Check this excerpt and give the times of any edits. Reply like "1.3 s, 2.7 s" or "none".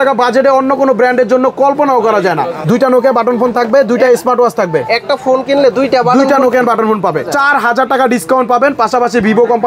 2.5 s, 7.3 s